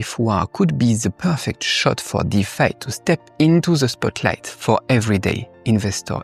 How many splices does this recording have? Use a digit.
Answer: 0